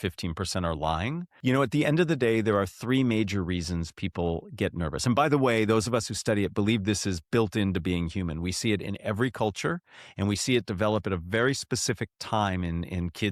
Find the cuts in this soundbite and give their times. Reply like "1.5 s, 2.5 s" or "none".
1.3 s

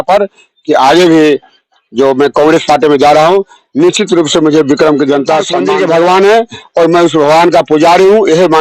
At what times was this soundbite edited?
5.5 s

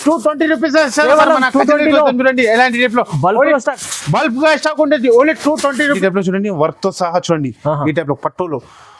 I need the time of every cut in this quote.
6.0 s

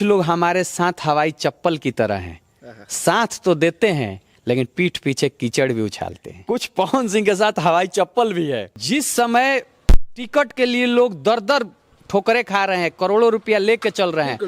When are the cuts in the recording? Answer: 6.3 s, 8.7 s

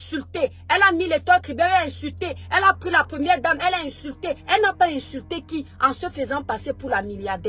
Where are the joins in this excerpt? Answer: none

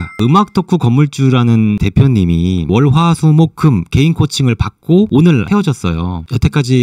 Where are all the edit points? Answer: none

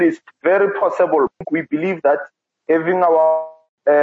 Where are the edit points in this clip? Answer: 1.3 s

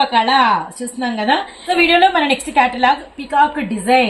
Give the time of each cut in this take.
1.5 s

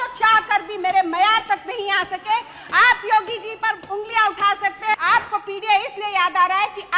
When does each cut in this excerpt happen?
4.9 s

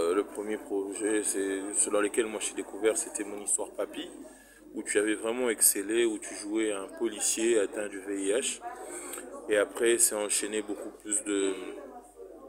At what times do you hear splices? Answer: none

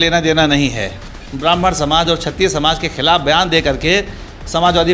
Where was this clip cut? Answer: 1.2 s

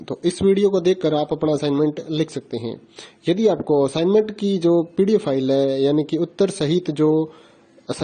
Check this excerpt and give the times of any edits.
none

